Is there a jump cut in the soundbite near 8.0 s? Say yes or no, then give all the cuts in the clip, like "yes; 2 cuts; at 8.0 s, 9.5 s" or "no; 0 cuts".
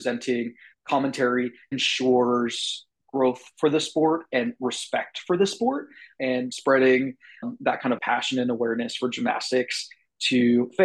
yes; 2 cuts; at 6.2 s, 8.0 s